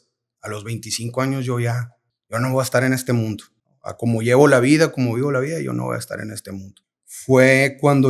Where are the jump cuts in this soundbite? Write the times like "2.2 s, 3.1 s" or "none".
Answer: 6.7 s